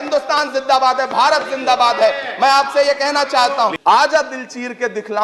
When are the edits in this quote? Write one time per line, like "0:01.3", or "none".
0:03.8